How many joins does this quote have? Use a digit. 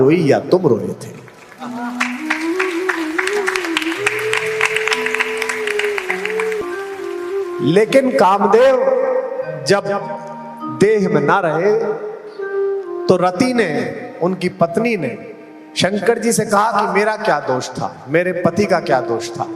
1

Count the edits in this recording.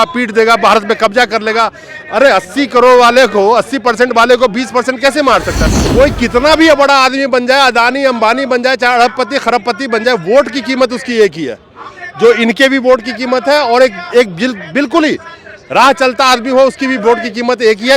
1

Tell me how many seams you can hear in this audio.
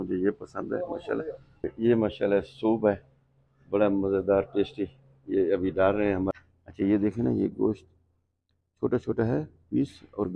2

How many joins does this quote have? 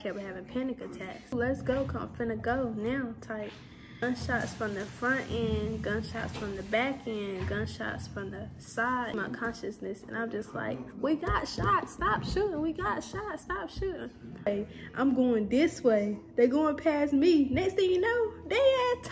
4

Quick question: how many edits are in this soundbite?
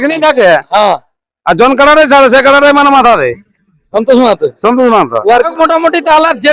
1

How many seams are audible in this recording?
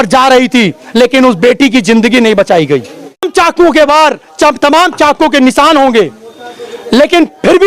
1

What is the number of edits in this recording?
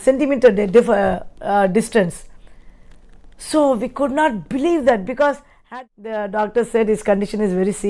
1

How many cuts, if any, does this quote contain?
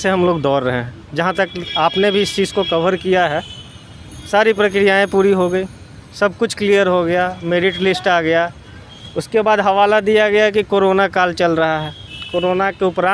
0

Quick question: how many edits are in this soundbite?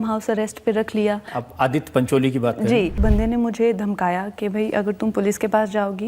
1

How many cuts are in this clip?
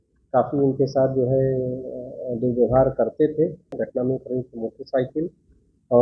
1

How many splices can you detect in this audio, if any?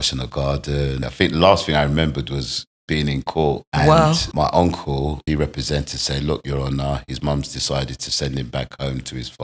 4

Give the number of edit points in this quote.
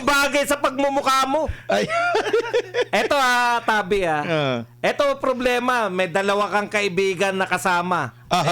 0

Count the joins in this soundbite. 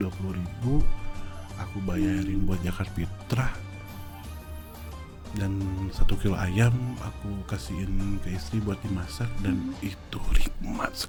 0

